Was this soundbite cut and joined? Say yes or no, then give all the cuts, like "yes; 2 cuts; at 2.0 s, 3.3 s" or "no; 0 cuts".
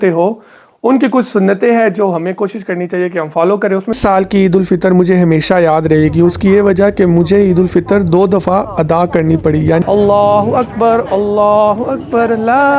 yes; 2 cuts; at 4.0 s, 9.8 s